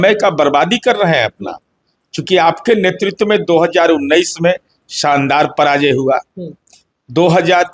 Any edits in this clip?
no; 0 cuts

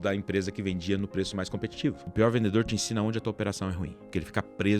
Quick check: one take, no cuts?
no; 2 cuts; at 2.0 s, 3.8 s

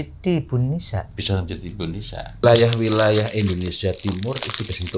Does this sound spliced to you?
yes; 1 cut; at 2.4 s

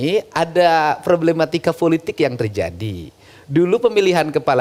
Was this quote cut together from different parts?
no; 0 cuts

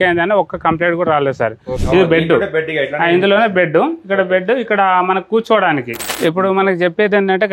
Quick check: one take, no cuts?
no; 2 cuts; at 1.8 s, 6.1 s

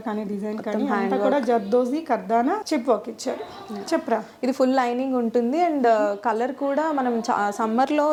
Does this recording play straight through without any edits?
yes; 0 cuts

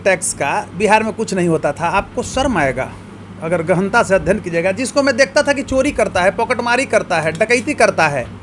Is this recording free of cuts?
yes; 0 cuts

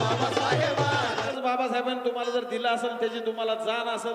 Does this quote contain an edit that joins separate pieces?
yes; 1 cut; at 1.3 s

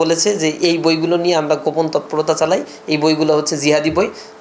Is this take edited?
no; 0 cuts

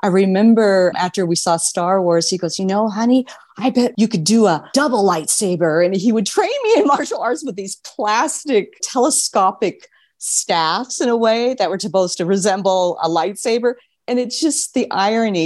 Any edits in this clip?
yes; 4 cuts; at 0.9 s, 3.9 s, 4.7 s, 8.8 s

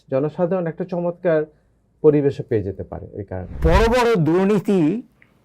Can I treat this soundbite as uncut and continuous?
no; 1 cut; at 3.6 s

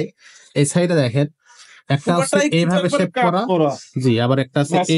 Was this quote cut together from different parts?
no; 0 cuts

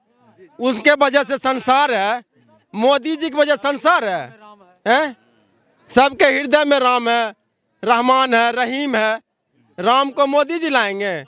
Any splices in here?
no; 0 cuts

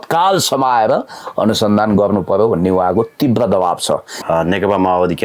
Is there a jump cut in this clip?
yes; 1 cut; at 4.1 s

